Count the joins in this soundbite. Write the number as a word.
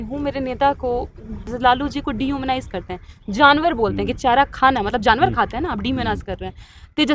one